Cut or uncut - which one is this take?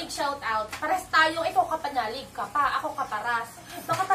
uncut